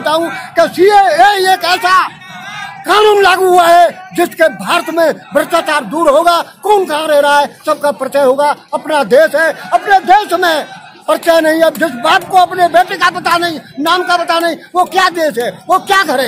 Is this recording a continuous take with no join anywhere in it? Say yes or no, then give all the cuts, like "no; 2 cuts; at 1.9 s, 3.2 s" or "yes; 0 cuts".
yes; 0 cuts